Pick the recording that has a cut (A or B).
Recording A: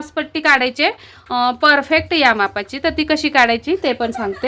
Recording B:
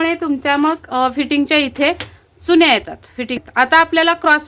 B